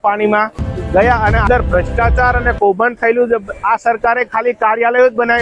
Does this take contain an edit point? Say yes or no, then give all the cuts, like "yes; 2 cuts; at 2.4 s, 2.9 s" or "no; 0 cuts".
yes; 2 cuts; at 1.4 s, 3.5 s